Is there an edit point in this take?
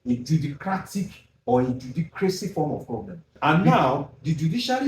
yes; 1 cut; at 3.3 s

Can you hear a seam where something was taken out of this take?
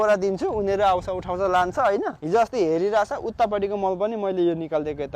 yes; 1 cut; at 2.2 s

